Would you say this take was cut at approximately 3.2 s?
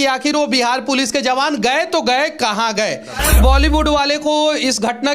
yes; 1 cut; at 3.2 s

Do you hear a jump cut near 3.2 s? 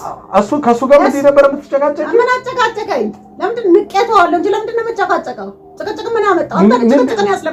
no; 0 cuts

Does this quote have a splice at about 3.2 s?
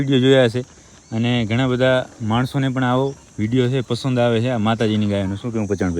no; 0 cuts

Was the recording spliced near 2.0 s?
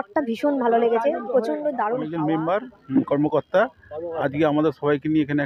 yes; 1 cut; at 2.0 s

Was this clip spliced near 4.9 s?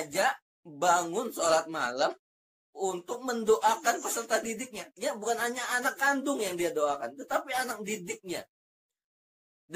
yes; 1 cut; at 4.9 s

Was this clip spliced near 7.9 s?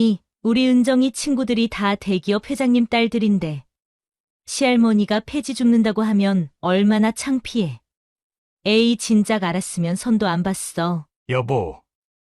no; 1 cut; at 11.1 s

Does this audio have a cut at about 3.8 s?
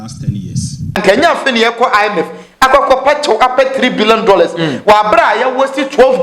no; 1 cut; at 1.0 s

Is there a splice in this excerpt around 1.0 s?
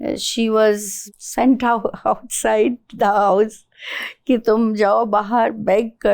yes; 1 cut; at 1.0 s

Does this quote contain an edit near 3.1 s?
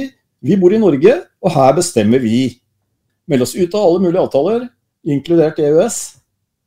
yes; 1 cut; at 3.1 s

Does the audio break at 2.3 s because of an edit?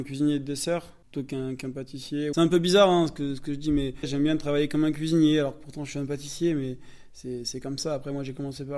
yes; 3 cuts; at 1.0 s, 2.3 s, 4.1 s

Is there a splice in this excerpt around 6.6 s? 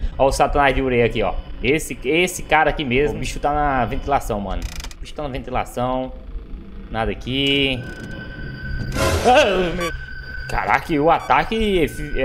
no; 2 cuts; at 3.3 s, 9.8 s

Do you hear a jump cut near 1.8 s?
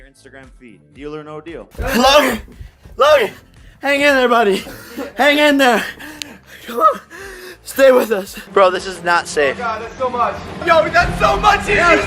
yes; 2 cuts; at 1.8 s, 8.4 s

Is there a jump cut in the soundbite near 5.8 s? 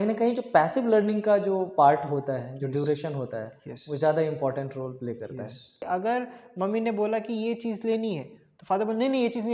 yes; 1 cut; at 5.8 s

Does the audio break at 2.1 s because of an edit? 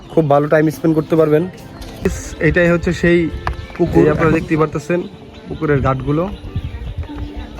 yes; 1 cut; at 2.1 s

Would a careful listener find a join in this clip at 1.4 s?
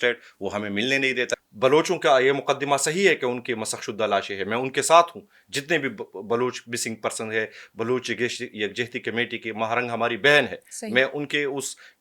yes; 1 cut; at 1.4 s

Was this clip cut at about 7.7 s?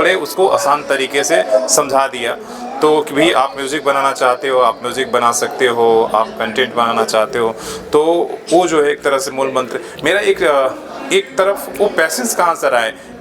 no; 0 cuts

